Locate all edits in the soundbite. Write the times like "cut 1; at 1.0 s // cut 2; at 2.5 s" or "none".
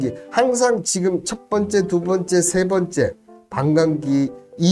none